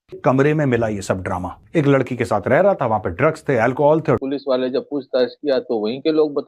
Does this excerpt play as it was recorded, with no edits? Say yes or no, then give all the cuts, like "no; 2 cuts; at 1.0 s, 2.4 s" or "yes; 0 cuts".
no; 2 cuts; at 1.5 s, 4.2 s